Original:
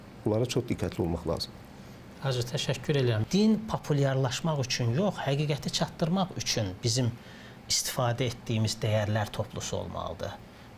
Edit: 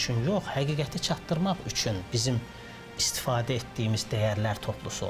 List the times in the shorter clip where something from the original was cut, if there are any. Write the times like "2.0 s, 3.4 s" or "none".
none

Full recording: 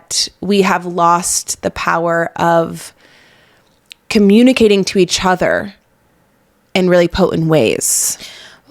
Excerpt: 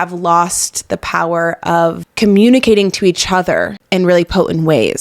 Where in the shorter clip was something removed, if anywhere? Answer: 2.0 s, 3.8 s

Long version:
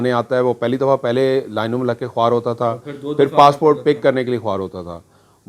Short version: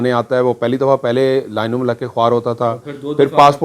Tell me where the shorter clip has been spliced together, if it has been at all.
none

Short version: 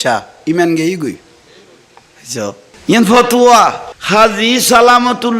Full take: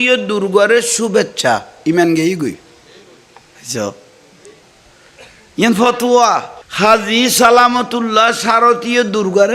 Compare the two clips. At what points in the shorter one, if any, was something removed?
2.7 s

